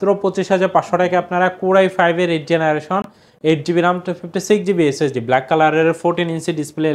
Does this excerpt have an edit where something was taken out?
no; 0 cuts

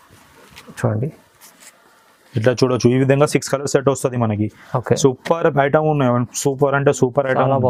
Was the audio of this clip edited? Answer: no; 0 cuts

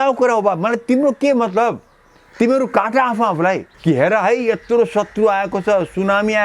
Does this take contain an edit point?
yes; 1 cut; at 3.7 s

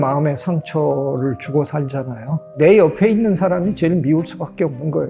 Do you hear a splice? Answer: yes; 1 cut; at 2.5 s

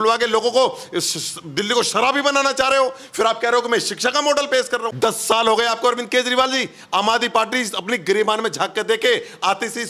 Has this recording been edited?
yes; 1 cut; at 4.9 s

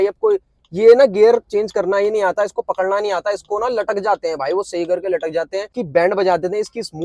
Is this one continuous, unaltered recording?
no; 1 cut; at 5.8 s

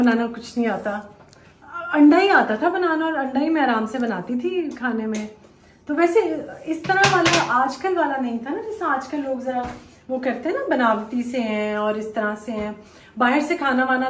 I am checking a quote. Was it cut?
no; 0 cuts

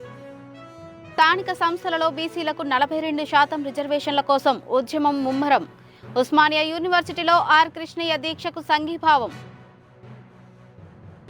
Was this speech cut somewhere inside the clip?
yes; 1 cut; at 1.0 s

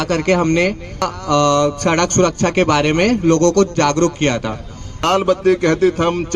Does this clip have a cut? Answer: yes; 2 cuts; at 1.1 s, 5.0 s

